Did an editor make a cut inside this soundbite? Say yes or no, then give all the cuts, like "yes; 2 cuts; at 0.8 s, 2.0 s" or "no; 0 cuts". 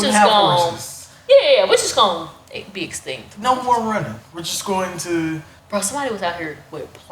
yes; 1 cut; at 5.5 s